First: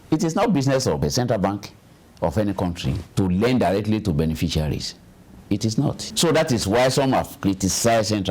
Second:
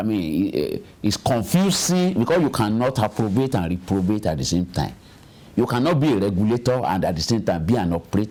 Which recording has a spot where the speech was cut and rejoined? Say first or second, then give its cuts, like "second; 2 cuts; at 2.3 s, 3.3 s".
first; 2 cuts; at 1.0 s, 6.1 s